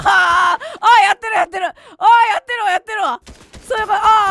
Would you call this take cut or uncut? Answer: cut